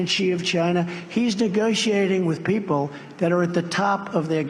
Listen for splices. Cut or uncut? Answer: uncut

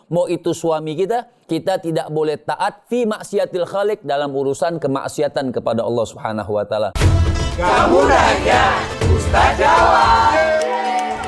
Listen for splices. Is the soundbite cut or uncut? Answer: cut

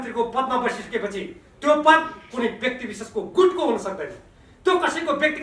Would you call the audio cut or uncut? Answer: uncut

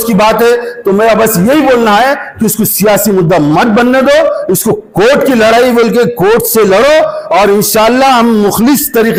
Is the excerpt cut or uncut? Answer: uncut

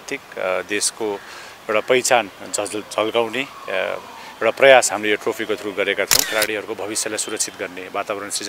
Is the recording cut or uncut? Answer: cut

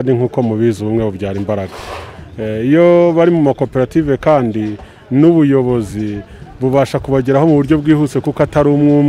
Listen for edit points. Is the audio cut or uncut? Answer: uncut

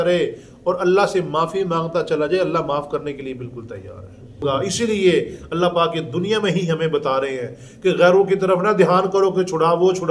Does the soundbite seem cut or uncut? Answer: cut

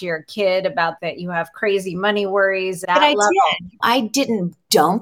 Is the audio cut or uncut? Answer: cut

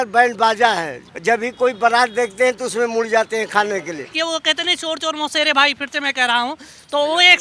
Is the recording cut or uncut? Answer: cut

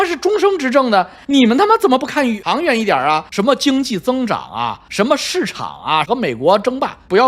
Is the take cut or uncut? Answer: cut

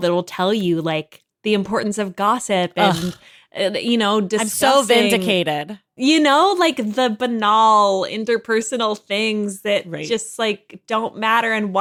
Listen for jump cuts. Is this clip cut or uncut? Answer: uncut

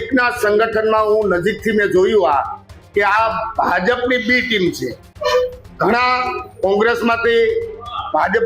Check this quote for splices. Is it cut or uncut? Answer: uncut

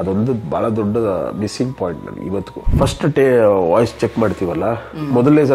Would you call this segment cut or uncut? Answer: cut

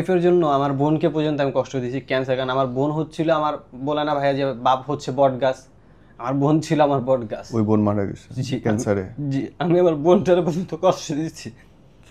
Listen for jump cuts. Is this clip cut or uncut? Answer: cut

